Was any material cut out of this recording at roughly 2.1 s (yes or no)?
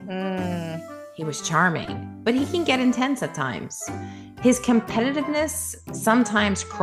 no